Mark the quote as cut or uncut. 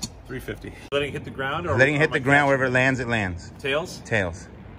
cut